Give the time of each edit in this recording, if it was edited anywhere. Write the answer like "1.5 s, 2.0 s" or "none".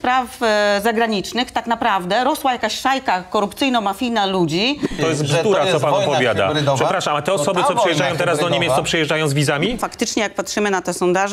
5.0 s, 9.8 s